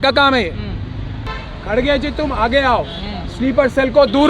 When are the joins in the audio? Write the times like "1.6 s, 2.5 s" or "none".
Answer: 1.2 s